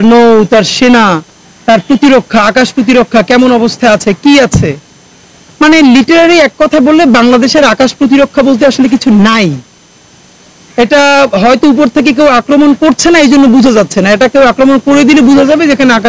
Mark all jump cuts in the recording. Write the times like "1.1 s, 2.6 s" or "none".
none